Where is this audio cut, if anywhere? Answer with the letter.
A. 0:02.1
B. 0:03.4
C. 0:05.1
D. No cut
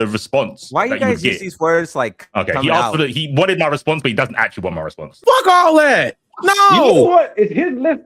C